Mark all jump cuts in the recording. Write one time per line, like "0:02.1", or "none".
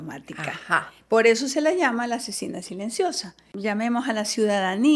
0:03.5

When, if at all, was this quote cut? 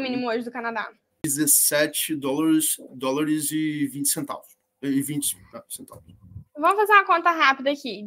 0:01.2

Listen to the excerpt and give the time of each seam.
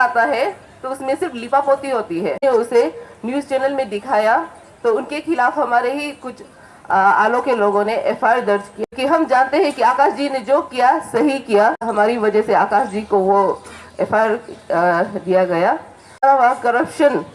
0:02.4
0:08.7
0:11.9
0:16.2

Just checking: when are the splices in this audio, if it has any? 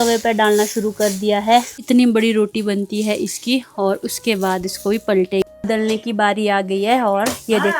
0:01.8
0:05.4

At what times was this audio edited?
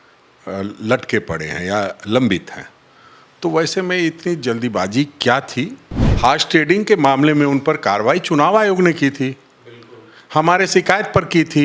0:06.0

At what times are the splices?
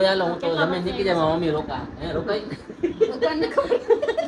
none

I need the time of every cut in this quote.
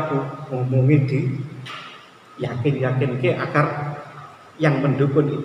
none

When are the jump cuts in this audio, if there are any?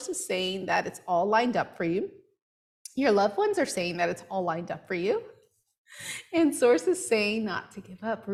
none

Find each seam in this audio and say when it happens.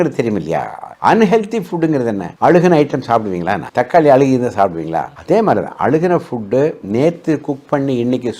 0:02.2
0:03.6

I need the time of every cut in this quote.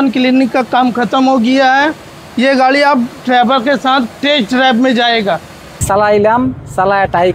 0:05.8

